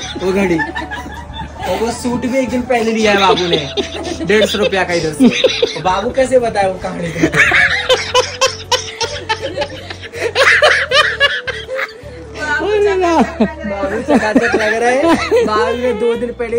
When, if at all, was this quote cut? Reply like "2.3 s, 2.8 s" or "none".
none